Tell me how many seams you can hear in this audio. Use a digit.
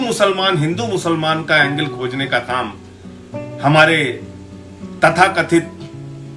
0